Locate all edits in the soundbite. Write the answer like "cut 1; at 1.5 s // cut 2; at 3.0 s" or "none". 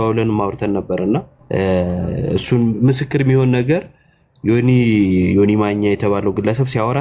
cut 1; at 1.4 s

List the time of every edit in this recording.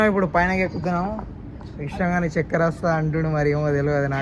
none

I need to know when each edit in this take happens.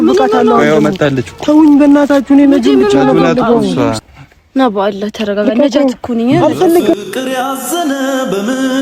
cut 1; at 4.0 s

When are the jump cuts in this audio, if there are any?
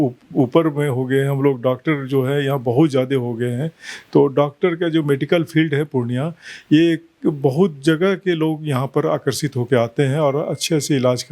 none

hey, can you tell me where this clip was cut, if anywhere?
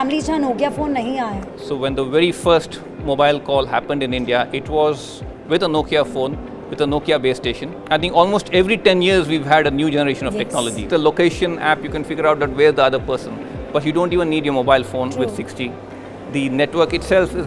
cut 1; at 1.4 s // cut 2; at 7.7 s // cut 3; at 10.9 s

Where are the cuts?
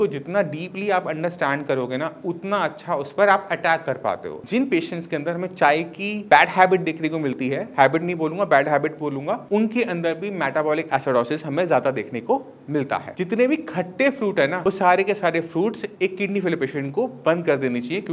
cut 1; at 4.3 s // cut 2; at 13.1 s

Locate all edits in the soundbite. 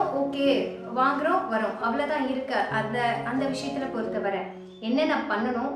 none

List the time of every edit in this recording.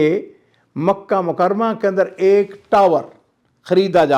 none

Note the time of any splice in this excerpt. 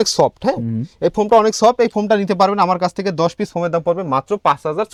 none

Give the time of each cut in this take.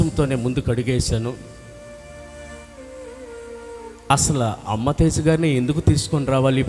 none

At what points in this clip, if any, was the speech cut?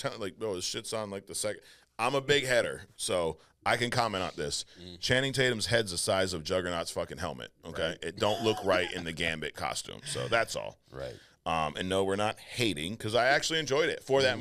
none

